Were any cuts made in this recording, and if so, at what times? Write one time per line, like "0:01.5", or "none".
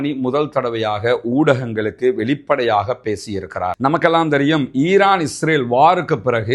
none